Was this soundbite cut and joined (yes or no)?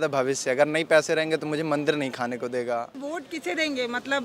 yes